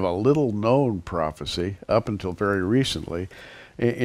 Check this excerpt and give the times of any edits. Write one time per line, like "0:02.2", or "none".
0:02.3